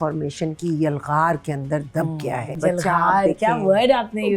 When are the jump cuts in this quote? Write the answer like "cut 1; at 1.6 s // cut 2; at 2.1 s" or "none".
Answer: cut 1; at 2.6 s